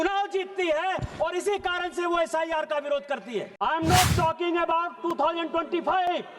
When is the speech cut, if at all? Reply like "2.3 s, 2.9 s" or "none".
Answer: 3.5 s